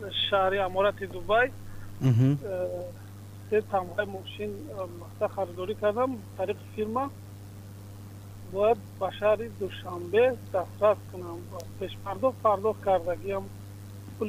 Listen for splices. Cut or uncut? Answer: uncut